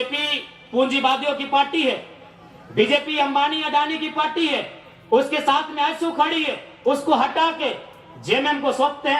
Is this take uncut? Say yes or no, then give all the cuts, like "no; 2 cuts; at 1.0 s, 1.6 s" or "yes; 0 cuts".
yes; 0 cuts